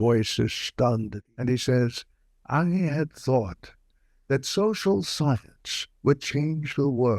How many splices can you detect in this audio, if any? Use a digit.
1